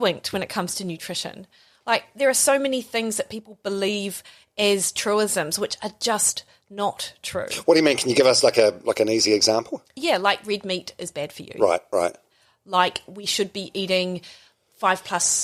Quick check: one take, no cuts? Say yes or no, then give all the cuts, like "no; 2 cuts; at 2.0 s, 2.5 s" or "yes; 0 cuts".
yes; 0 cuts